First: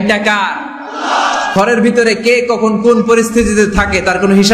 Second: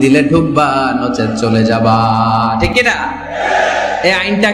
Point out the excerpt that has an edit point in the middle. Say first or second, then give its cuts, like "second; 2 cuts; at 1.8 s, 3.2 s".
first; 1 cut; at 1.5 s